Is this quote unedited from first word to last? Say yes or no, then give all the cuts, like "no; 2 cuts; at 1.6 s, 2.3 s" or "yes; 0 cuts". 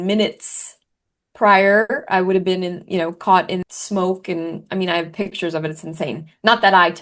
no; 1 cut; at 3.6 s